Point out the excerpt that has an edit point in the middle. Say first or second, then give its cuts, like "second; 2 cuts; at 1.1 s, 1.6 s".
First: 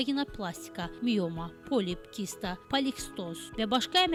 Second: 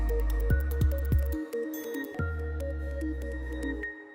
second; 1 cut; at 2.1 s